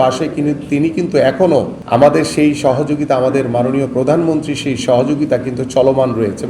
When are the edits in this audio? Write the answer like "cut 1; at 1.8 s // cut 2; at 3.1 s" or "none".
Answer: cut 1; at 1.8 s